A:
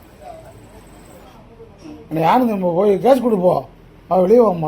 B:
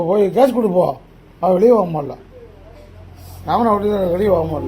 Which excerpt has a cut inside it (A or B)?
A